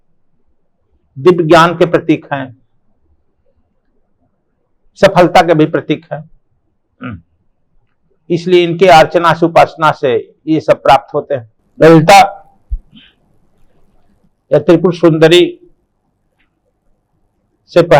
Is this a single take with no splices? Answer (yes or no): no